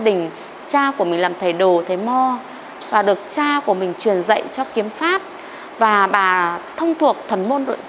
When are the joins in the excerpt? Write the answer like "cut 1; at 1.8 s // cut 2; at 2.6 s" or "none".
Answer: cut 1; at 2.7 s